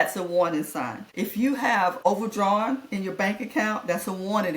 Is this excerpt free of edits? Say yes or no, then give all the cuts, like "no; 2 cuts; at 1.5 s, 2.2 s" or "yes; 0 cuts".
no; 2 cuts; at 1.0 s, 2.0 s